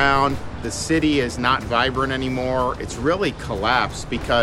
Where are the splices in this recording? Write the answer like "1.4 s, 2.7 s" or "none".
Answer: none